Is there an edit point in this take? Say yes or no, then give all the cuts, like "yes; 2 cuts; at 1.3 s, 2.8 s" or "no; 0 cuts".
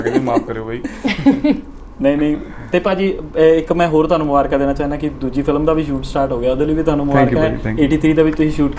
no; 0 cuts